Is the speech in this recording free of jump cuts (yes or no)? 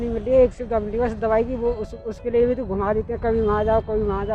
yes